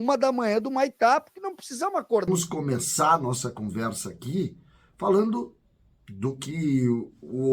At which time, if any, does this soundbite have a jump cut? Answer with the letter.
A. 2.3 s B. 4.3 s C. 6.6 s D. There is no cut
A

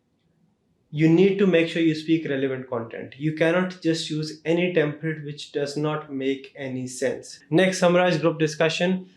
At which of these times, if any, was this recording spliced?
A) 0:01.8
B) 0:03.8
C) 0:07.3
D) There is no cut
C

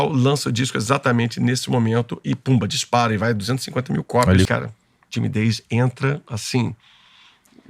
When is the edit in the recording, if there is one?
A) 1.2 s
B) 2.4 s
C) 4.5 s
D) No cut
C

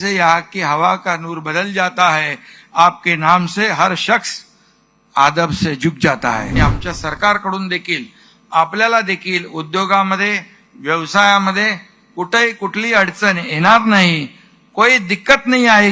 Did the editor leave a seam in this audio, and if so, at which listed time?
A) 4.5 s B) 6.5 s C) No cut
B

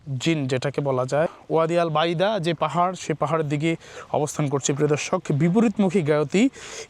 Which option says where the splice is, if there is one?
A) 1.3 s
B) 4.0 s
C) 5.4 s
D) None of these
A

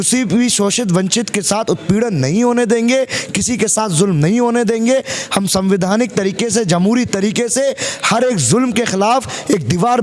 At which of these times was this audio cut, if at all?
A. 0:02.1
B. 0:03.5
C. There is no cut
C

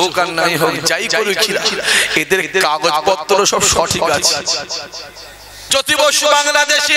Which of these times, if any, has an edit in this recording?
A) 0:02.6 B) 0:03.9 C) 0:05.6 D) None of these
C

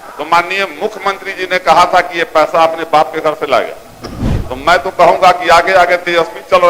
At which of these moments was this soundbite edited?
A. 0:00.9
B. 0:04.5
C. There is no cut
B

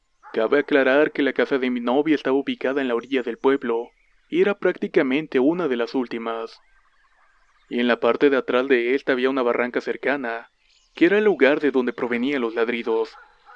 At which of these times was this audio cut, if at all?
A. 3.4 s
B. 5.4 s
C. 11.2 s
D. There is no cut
A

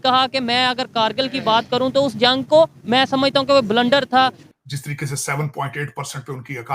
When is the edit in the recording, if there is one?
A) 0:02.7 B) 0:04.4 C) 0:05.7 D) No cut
B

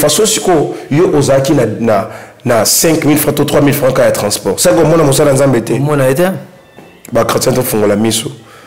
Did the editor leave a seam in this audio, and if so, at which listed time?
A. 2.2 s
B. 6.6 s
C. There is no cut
C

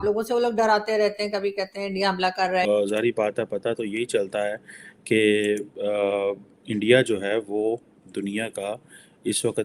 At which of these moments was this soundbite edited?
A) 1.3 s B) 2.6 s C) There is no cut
B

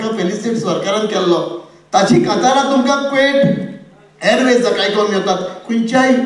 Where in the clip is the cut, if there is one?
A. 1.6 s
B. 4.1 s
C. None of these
C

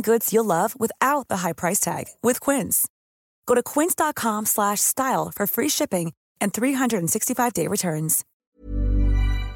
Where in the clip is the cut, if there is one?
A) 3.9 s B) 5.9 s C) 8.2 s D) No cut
C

